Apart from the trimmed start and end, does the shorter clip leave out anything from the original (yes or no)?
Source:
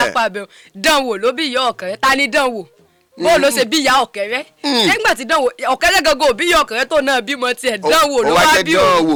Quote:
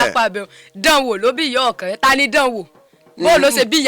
no